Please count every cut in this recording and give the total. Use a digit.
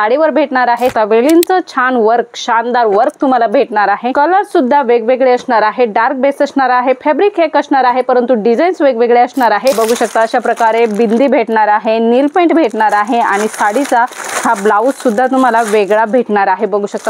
2